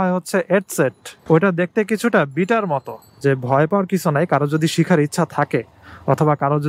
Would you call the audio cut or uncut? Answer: cut